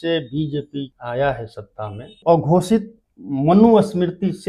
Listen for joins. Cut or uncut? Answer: cut